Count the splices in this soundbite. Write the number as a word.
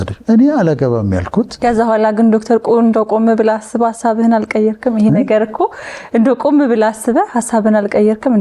one